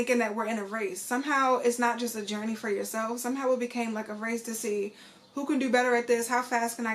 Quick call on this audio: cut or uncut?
uncut